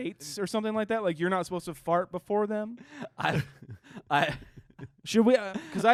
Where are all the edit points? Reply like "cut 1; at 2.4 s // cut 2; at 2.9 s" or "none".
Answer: none